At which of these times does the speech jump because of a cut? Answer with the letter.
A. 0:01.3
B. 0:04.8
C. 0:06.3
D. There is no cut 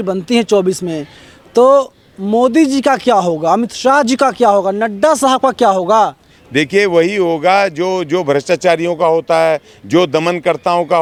D